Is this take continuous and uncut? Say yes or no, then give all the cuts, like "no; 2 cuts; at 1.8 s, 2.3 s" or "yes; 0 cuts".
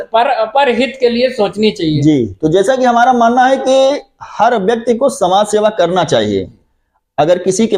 yes; 0 cuts